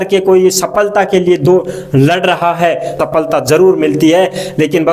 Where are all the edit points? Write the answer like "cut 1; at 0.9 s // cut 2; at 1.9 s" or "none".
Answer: cut 1; at 3.0 s